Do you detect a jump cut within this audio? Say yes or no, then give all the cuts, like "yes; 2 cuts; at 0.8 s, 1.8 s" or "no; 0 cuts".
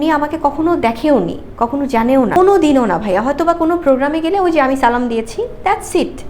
no; 0 cuts